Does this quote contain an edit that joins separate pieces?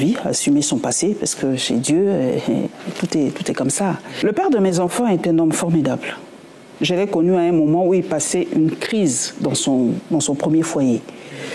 yes; 1 cut; at 4.1 s

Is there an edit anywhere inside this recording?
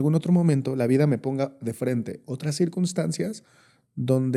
no; 0 cuts

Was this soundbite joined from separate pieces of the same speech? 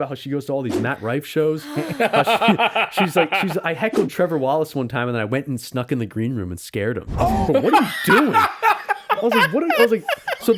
no; 0 cuts

